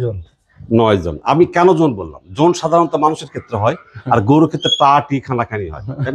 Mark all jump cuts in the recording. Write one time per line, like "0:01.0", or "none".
none